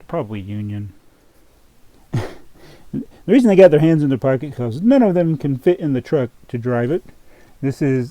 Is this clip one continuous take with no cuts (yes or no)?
yes